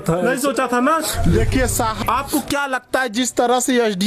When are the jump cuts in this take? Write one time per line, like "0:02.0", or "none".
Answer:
0:02.0